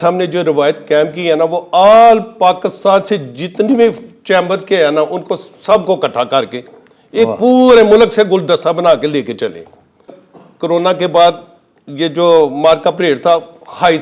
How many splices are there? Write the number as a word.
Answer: one